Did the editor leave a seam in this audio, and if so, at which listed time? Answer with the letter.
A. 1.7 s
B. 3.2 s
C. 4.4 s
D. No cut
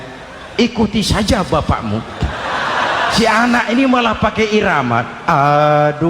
B